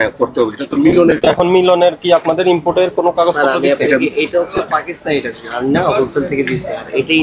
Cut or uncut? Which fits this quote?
uncut